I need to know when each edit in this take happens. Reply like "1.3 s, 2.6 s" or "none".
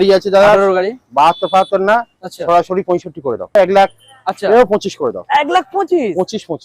3.5 s